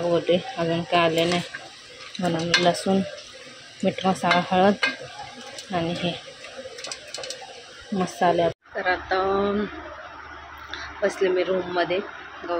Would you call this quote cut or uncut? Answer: cut